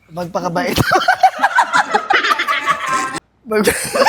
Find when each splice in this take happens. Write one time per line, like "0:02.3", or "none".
none